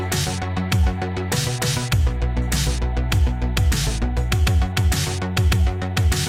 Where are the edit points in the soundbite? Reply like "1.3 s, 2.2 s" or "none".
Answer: none